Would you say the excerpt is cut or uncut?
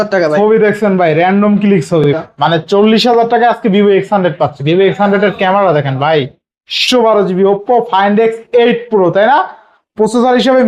cut